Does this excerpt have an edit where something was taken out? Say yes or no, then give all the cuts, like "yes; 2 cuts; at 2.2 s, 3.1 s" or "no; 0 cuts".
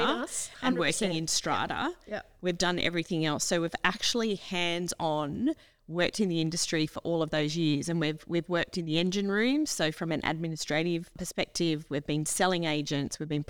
yes; 1 cut; at 11.2 s